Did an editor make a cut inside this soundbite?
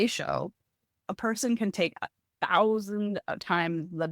yes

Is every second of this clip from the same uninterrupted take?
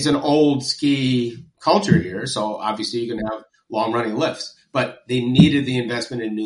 yes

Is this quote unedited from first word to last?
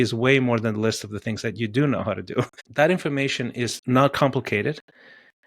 no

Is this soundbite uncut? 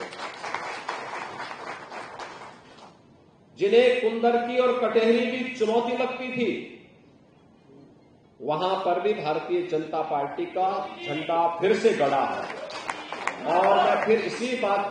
yes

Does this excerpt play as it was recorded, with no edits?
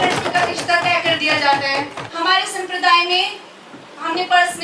no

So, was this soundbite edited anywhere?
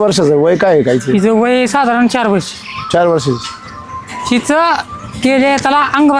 no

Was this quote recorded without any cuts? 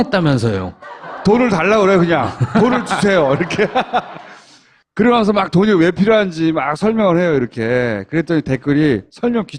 no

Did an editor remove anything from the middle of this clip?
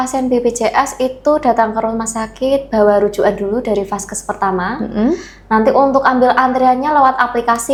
no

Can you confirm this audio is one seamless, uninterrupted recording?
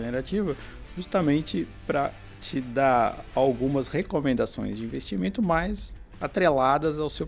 yes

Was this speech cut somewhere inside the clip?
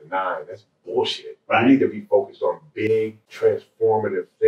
yes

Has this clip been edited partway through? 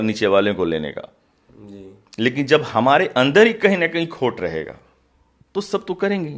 no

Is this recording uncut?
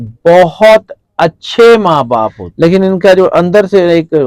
no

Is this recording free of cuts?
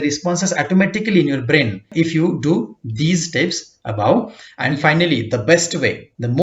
no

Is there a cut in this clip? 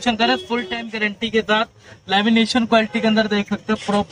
no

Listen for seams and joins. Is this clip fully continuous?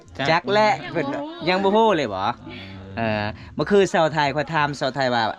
yes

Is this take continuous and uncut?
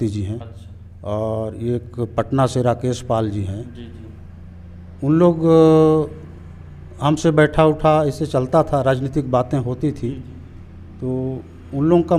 yes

